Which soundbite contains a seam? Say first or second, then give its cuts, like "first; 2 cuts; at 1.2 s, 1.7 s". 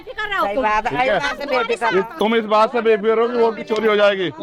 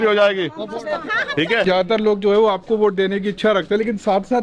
second; 1 cut; at 1.6 s